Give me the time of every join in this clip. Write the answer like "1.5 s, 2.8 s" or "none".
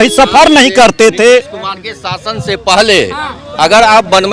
none